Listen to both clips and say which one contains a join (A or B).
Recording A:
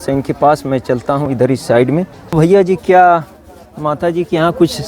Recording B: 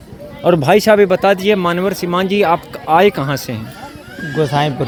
A